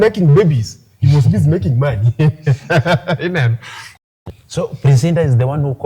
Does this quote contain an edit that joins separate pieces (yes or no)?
yes